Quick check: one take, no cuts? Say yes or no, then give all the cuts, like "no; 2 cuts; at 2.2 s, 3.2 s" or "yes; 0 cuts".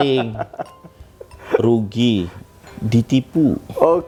yes; 0 cuts